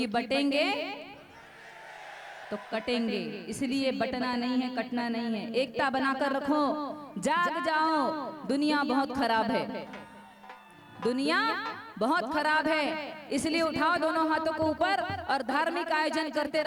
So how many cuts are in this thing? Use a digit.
0